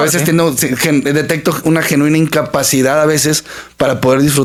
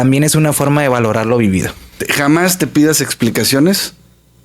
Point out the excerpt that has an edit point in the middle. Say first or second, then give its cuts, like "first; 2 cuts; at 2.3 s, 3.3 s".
second; 1 cut; at 2.0 s